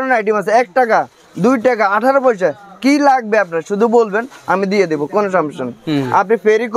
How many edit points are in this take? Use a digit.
0